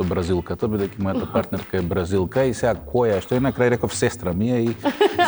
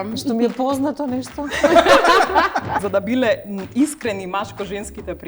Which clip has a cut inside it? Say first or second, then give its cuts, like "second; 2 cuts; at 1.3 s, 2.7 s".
second; 1 cut; at 2.8 s